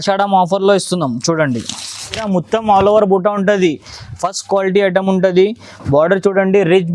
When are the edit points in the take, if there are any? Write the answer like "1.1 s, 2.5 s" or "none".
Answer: 2.3 s